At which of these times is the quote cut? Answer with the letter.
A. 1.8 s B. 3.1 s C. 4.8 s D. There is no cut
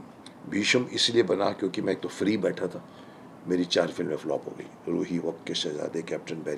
D